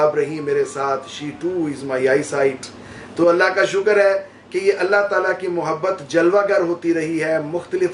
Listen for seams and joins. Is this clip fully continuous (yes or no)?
yes